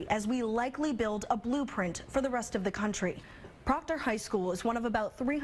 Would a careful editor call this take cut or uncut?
uncut